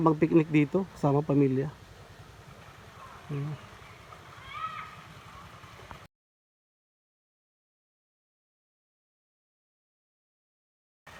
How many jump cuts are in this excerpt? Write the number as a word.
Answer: zero